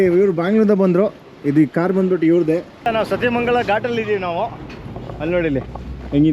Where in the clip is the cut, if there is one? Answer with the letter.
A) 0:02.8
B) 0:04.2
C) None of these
A